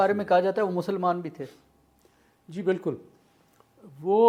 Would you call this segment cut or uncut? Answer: uncut